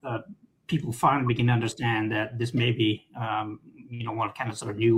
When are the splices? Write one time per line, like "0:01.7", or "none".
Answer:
none